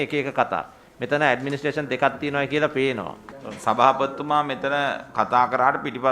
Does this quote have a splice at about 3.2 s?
yes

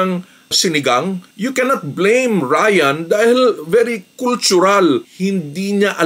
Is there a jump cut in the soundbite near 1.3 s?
yes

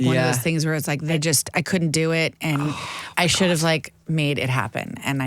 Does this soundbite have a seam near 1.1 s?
yes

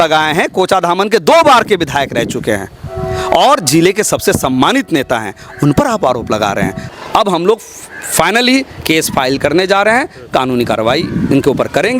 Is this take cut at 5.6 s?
no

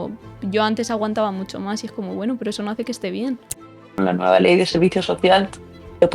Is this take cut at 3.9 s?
yes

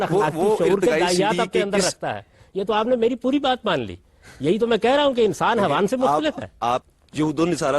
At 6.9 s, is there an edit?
yes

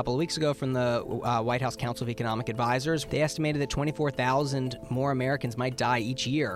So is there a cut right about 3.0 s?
yes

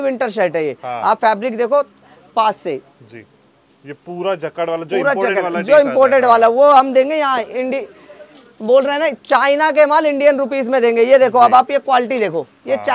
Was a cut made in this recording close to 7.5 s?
no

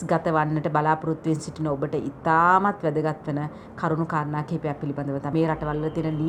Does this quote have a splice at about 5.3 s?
yes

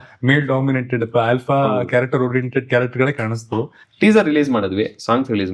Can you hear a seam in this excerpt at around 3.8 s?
yes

